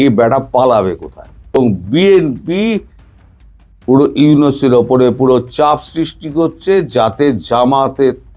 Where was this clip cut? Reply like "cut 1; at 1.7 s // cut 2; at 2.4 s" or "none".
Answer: cut 1; at 1.5 s